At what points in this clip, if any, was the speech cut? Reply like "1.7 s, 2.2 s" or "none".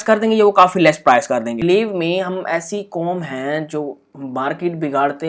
1.5 s